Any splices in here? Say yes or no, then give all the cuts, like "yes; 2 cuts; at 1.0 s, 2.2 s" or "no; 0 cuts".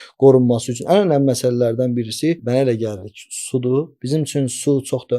yes; 2 cuts; at 2.4 s, 4.0 s